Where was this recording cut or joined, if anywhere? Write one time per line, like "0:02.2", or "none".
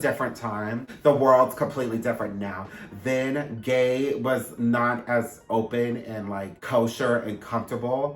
0:00.9
0:06.5

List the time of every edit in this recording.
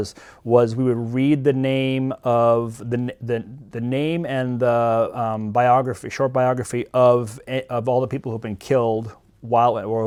none

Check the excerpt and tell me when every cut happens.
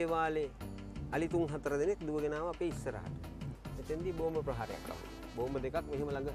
0:03.4

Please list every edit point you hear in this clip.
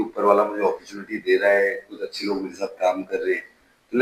none

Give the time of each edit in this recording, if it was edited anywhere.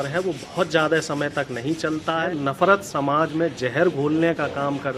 0:02.3

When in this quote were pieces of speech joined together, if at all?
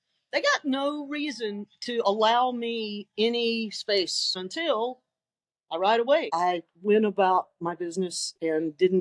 0:04.4
0:06.3

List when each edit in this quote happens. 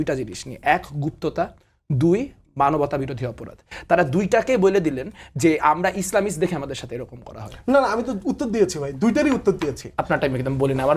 none

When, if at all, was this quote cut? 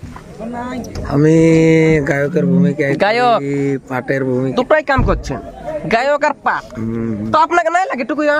0:04.5

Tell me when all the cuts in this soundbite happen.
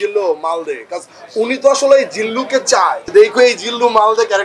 0:03.0

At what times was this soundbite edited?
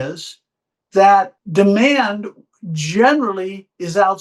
0:01.4

